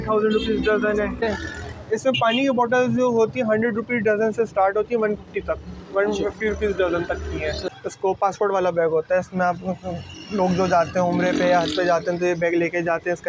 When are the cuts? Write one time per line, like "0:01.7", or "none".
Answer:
0:01.2
0:07.6